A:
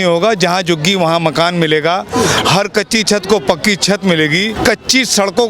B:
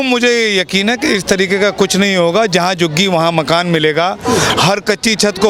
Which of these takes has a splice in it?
A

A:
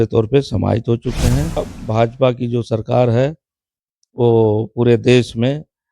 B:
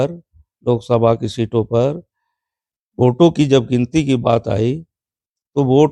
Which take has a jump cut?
A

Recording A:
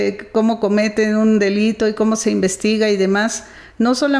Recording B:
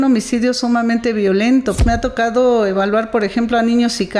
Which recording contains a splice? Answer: B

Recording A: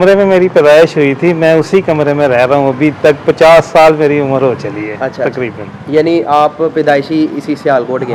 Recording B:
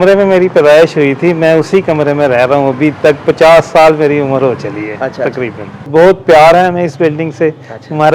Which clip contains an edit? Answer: B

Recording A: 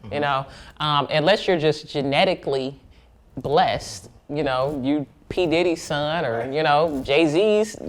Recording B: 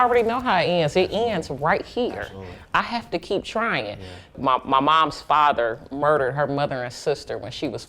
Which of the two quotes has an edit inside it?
B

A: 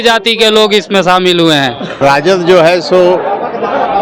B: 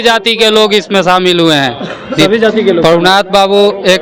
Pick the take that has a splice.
A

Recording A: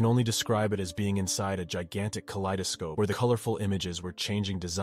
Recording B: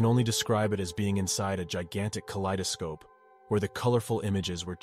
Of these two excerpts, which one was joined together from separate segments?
A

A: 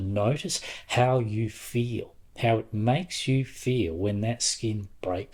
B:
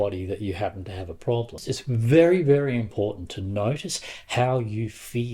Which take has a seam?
B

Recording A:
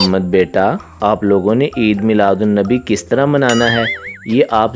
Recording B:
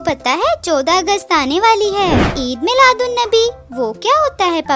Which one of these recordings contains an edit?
B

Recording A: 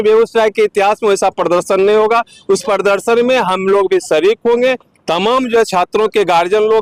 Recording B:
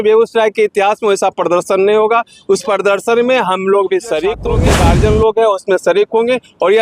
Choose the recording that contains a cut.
B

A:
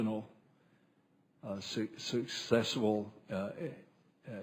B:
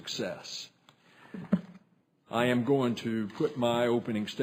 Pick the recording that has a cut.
A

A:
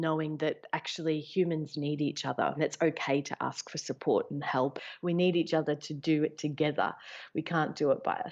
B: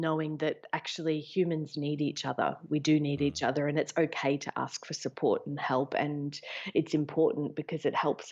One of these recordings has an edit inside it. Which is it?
A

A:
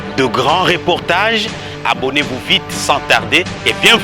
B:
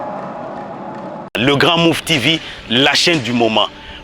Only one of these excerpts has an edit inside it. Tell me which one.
B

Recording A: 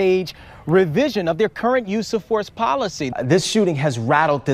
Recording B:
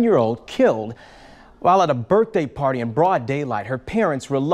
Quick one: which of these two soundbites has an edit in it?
A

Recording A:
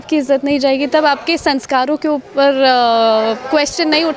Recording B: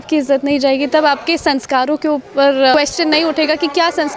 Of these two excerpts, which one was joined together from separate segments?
B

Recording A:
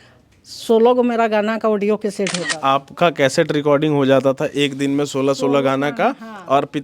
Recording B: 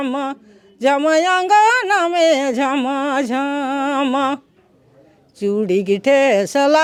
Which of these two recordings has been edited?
A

